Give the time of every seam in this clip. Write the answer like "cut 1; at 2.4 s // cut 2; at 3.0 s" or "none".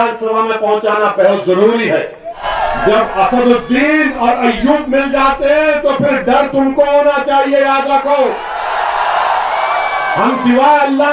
cut 1; at 2.5 s